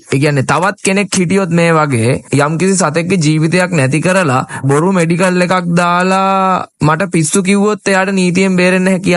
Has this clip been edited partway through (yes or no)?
yes